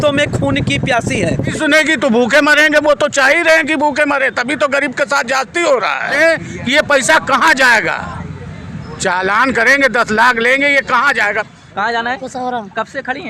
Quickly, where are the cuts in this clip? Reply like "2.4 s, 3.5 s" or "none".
1.5 s, 6.1 s, 11.5 s